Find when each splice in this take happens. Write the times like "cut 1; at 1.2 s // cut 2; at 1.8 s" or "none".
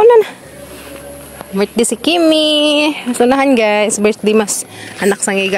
none